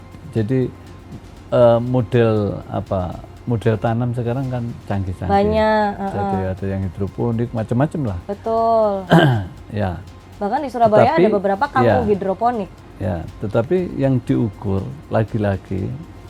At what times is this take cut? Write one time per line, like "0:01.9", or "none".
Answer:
none